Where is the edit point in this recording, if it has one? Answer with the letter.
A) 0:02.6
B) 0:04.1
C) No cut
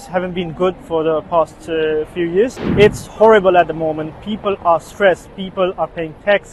A